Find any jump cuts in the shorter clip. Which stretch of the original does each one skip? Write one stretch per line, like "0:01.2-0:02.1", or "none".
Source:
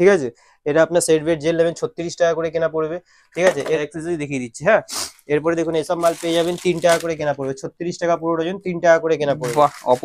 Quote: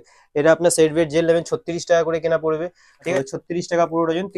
0:03.4-0:07.4